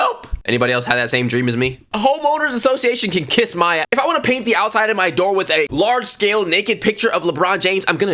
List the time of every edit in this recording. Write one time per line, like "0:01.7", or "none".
0:01.9
0:03.9
0:05.7